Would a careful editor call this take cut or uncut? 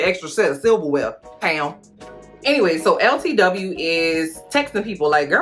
uncut